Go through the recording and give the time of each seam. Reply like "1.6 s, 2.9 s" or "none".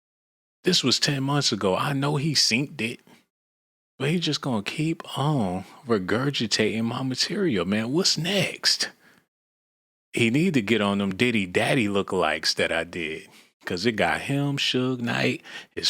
11.1 s